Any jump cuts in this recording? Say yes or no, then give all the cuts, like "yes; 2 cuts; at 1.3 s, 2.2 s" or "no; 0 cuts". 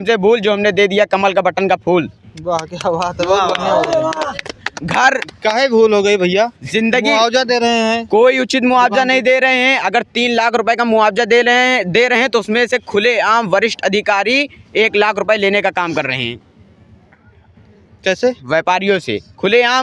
no; 0 cuts